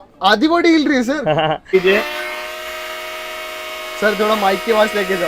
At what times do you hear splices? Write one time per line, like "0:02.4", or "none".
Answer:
0:01.7